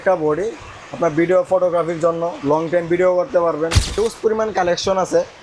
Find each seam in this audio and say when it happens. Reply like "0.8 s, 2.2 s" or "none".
4.0 s